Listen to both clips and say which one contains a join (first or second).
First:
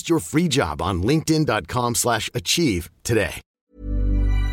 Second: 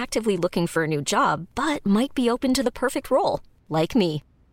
first